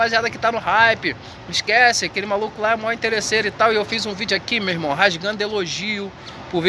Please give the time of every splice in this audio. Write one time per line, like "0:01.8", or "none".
none